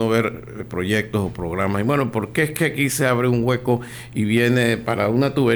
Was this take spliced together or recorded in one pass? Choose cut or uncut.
uncut